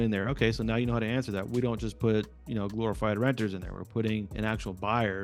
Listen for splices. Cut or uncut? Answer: cut